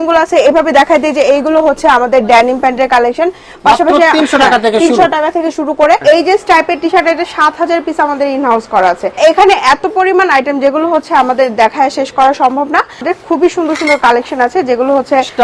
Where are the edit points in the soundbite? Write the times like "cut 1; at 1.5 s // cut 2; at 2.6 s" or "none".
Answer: cut 1; at 6.0 s // cut 2; at 9.2 s // cut 3; at 13.1 s